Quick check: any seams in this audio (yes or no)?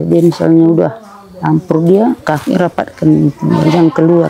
no